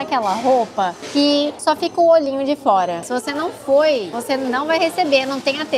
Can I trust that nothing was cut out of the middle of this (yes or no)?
no